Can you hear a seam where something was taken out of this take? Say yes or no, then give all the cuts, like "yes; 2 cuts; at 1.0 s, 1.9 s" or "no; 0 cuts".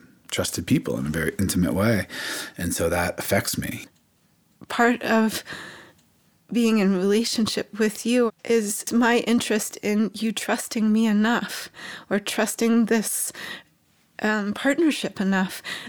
yes; 2 cuts; at 3.8 s, 8.4 s